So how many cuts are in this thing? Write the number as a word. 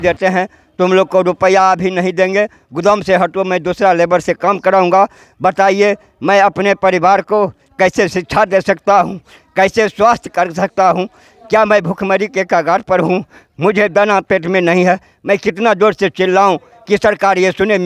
zero